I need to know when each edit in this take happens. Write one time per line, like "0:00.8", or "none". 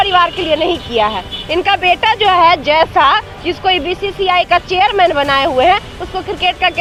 none